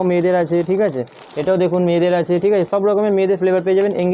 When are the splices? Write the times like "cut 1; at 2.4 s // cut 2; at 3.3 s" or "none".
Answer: none